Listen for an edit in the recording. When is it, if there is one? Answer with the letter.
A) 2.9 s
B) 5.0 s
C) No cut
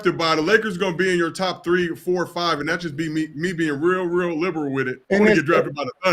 B